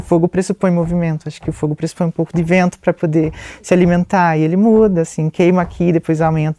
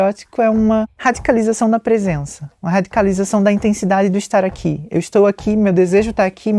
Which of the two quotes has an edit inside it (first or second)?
second